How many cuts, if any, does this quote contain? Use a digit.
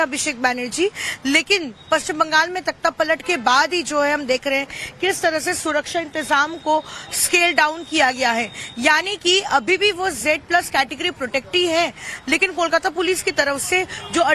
1